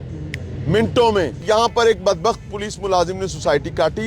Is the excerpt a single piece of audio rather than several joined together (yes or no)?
no